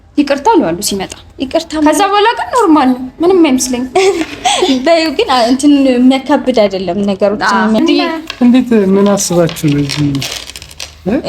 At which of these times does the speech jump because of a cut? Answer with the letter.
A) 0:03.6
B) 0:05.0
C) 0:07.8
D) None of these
C